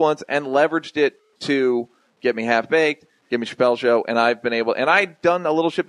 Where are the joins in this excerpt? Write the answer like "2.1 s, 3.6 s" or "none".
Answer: none